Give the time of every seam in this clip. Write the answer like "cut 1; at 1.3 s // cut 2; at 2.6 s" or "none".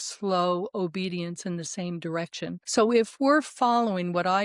cut 1; at 2.6 s